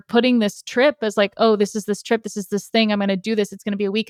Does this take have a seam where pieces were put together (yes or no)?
no